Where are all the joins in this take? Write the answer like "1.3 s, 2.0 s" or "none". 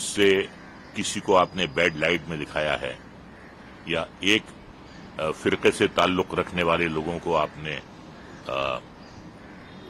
none